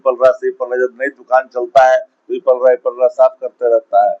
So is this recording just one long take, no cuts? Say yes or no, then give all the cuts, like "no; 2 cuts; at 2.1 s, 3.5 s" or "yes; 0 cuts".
yes; 0 cuts